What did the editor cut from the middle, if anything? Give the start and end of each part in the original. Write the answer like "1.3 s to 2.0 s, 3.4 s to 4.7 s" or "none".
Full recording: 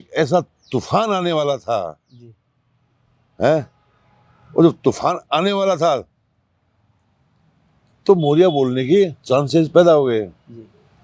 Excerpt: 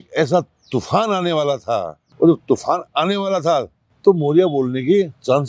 2.0 s to 4.4 s, 6.2 s to 7.8 s